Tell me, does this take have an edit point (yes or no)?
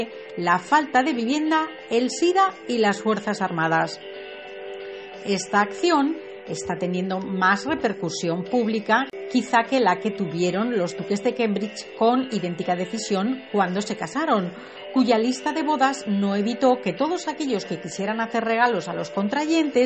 no